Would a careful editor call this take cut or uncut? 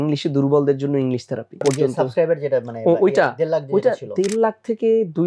cut